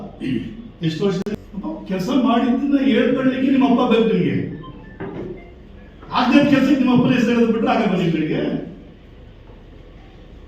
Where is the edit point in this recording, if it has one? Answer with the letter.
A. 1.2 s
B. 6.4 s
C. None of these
A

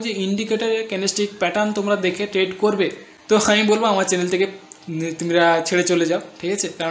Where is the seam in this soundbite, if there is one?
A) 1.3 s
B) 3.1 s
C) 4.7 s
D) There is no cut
B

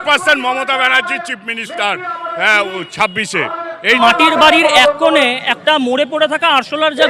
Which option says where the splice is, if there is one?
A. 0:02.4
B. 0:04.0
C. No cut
B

